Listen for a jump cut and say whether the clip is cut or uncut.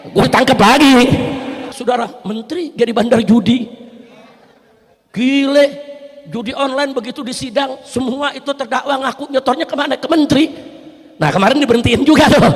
cut